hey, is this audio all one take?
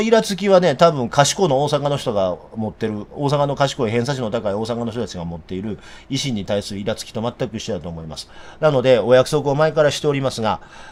yes; 0 cuts

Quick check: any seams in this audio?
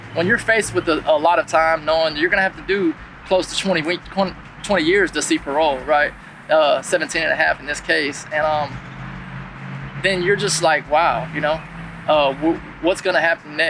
no; 0 cuts

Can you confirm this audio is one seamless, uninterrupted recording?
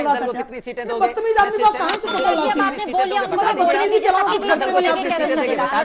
yes; 0 cuts

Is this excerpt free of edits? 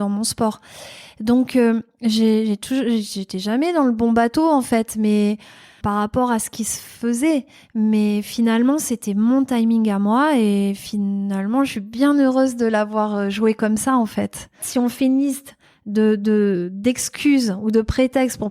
no; 2 cuts; at 5.8 s, 14.6 s

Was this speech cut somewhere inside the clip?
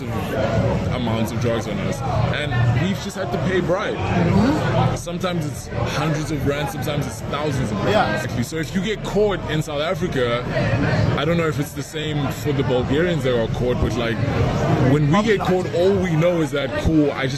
no; 0 cuts

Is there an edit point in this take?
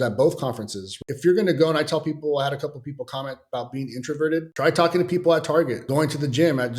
yes; 3 cuts; at 0.9 s, 4.5 s, 5.8 s

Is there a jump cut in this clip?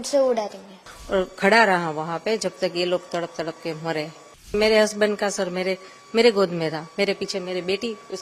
yes; 2 cuts; at 0.9 s, 4.5 s

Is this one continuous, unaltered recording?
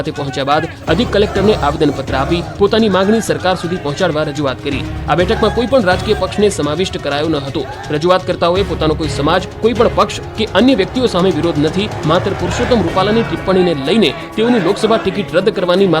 no; 1 cut; at 8.6 s

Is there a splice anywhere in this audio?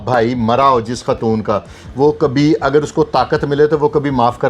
no; 0 cuts

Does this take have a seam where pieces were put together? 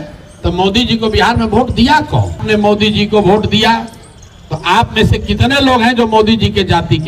yes; 1 cut; at 2.4 s

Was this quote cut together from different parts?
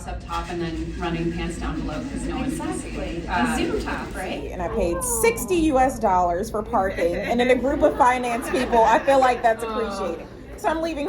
yes; 1 cut; at 4.3 s

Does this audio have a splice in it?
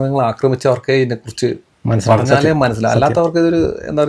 no; 0 cuts

